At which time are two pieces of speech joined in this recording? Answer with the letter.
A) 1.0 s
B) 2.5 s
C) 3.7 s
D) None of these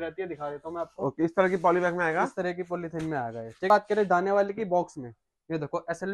C